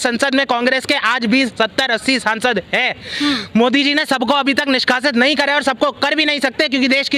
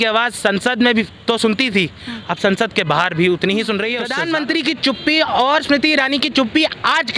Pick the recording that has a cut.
second; 1 cut; at 4.1 s

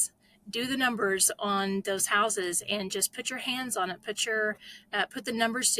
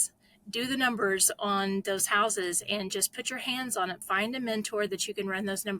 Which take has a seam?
second; 1 cut; at 4.0 s

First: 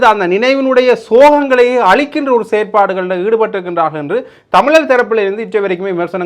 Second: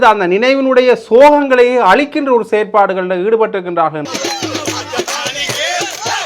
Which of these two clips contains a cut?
second; 1 cut; at 4.1 s

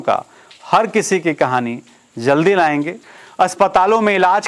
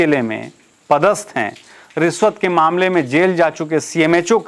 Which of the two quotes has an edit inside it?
first; 1 cut; at 3.0 s

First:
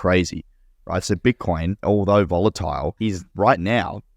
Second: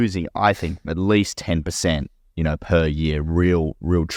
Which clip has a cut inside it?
first; 2 cuts; at 1.8 s, 3.2 s

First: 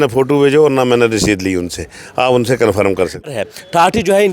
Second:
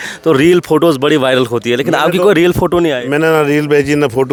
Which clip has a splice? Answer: first; 1 cut; at 3.2 s

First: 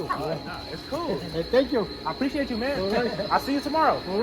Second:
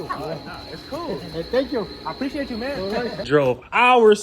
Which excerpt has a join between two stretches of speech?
second; 1 cut; at 3.2 s

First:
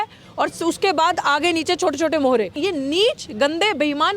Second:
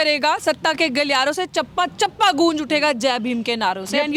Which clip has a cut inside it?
first; 1 cut; at 2.6 s

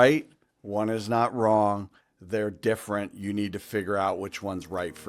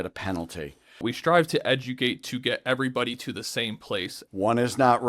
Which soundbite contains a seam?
second; 2 cuts; at 1.0 s, 4.2 s

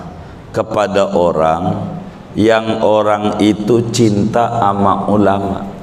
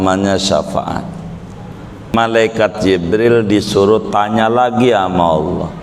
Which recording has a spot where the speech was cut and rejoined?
second; 1 cut; at 2.1 s

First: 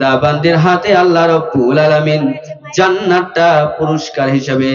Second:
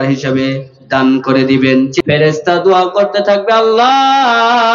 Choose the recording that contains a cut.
second; 1 cut; at 2.0 s

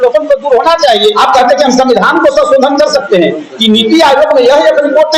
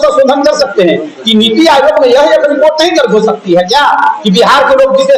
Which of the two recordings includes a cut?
first; 1 cut; at 1.2 s

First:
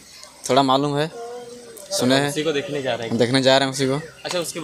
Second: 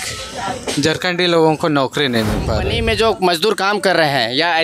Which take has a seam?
second; 1 cut; at 2.7 s

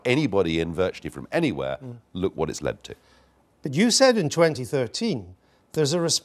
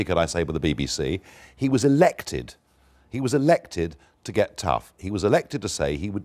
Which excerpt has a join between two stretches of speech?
first; 1 cut; at 5.0 s

